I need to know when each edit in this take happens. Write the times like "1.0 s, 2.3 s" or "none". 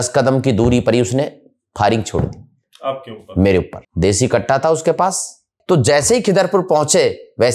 3.8 s, 5.5 s